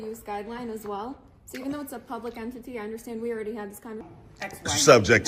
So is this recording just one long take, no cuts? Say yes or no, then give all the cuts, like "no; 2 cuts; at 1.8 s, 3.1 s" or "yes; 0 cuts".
no; 1 cut; at 4.1 s